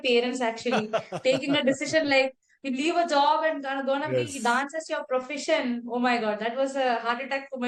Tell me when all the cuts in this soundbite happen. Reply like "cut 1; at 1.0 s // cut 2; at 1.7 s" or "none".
none